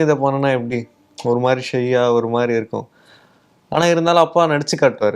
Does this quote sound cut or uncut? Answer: uncut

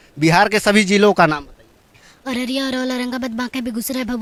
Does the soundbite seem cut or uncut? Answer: uncut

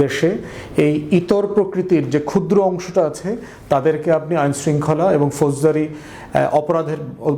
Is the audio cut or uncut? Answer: uncut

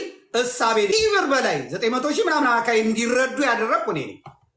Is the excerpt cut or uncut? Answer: cut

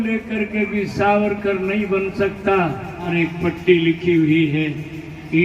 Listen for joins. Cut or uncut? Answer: cut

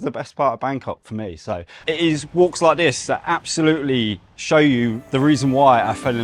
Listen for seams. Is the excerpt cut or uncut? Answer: cut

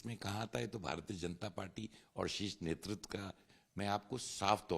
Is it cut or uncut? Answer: cut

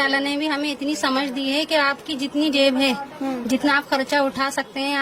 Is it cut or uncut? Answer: uncut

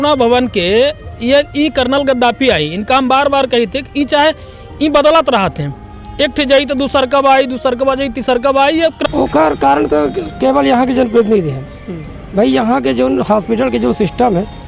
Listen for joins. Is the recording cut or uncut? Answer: cut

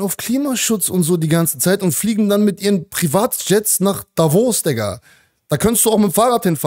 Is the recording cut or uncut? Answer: uncut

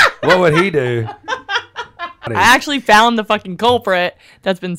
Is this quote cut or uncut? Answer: cut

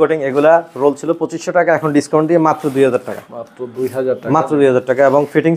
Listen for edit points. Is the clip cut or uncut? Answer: uncut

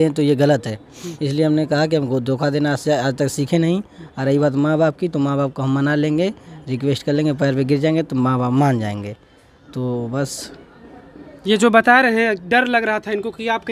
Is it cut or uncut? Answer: uncut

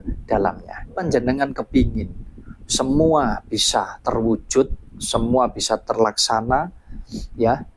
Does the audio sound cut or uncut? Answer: cut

